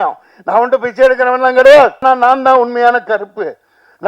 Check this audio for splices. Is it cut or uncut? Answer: cut